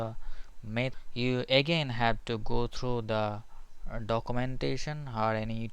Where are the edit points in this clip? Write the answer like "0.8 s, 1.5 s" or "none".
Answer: 0.9 s